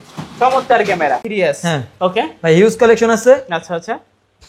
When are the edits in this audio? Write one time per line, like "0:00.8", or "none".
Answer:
0:01.3